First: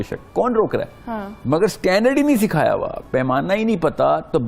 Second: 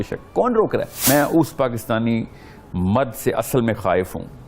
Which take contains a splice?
second; 1 cut; at 1.0 s

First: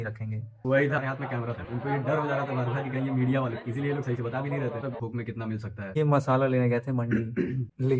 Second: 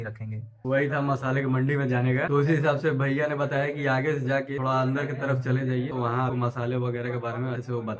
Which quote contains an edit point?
first; 2 cuts; at 1.0 s, 5.0 s

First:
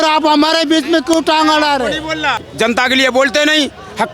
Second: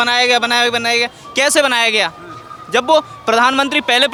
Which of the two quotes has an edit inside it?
first; 1 cut; at 2.4 s

